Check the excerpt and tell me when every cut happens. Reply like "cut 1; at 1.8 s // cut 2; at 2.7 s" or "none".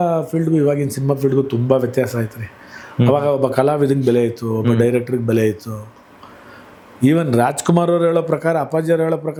none